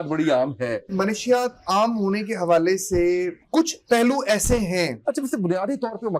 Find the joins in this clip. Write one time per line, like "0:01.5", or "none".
0:00.9
0:03.4
0:05.0